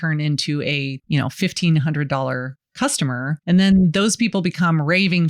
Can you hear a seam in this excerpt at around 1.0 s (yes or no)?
yes